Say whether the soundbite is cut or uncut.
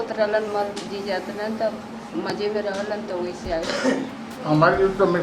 cut